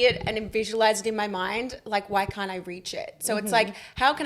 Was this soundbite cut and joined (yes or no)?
no